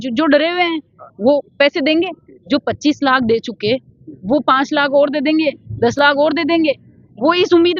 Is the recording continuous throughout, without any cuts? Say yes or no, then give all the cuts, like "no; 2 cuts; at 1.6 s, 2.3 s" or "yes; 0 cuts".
yes; 0 cuts